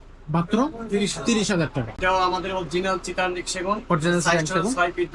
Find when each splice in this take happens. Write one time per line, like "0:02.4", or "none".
0:02.0